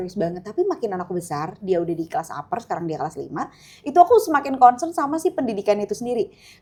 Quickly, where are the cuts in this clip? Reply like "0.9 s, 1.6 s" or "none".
none